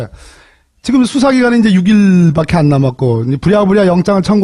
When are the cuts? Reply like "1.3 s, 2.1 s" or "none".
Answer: 2.6 s